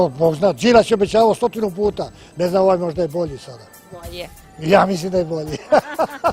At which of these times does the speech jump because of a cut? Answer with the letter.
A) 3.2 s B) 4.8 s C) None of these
C